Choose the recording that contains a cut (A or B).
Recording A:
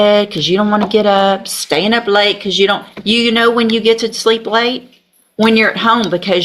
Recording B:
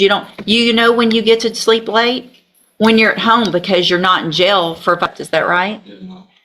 B